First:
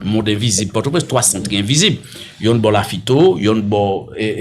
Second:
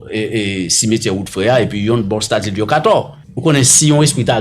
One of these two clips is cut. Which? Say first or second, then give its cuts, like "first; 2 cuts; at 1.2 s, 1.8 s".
second; 1 cut; at 3.2 s